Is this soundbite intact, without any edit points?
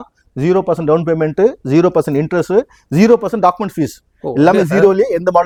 yes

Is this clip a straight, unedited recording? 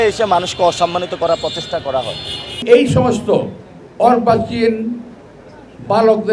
no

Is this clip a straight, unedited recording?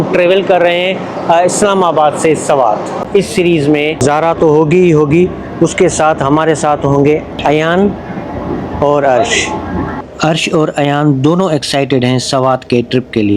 no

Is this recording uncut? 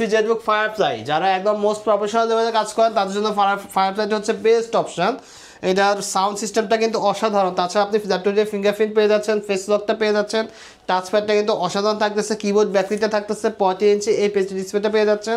yes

